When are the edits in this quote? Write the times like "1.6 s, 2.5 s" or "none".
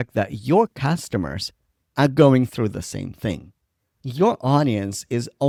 none